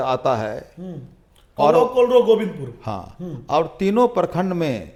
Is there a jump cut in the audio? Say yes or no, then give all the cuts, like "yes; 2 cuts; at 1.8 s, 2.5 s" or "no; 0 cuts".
no; 0 cuts